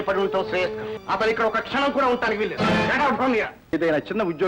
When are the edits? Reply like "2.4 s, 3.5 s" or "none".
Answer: 0.9 s, 2.5 s, 3.7 s